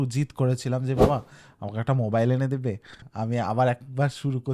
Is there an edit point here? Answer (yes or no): yes